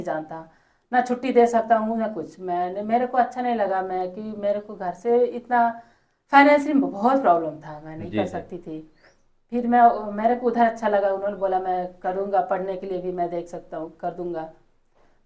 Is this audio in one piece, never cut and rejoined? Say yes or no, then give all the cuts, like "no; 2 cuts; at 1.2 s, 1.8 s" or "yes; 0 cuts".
yes; 0 cuts